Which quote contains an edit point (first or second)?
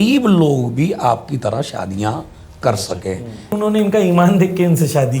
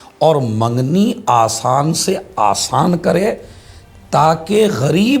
first